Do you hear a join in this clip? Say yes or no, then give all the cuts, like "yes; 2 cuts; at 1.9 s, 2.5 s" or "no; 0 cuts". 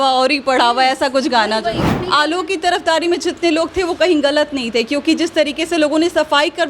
yes; 1 cut; at 1.8 s